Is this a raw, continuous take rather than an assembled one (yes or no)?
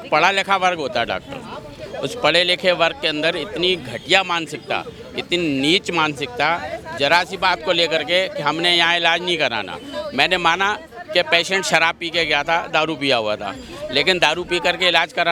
yes